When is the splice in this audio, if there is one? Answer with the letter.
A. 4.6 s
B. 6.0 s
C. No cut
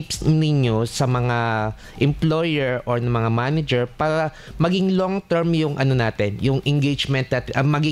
C